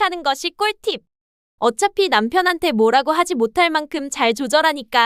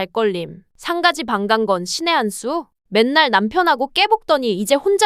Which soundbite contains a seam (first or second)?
second